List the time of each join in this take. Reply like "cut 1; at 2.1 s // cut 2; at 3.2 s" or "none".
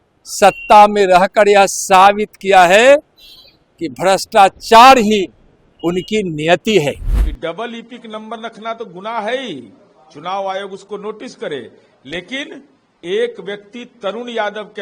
cut 1; at 7.1 s